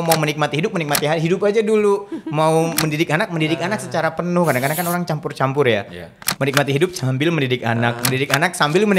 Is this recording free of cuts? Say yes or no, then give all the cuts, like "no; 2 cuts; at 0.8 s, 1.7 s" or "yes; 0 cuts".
yes; 0 cuts